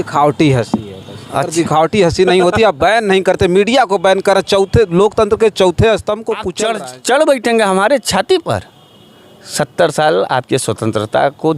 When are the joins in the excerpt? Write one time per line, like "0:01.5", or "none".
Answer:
0:06.5